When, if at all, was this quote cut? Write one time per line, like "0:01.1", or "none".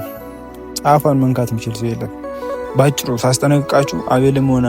0:02.5